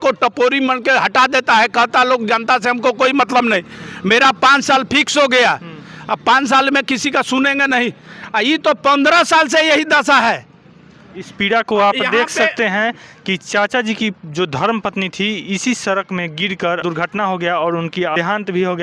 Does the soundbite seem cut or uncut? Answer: uncut